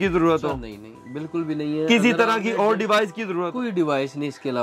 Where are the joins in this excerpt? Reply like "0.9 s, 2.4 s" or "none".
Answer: 3.5 s